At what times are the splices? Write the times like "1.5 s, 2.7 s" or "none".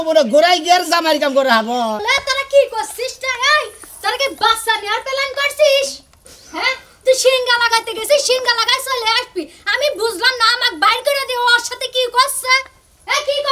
2.0 s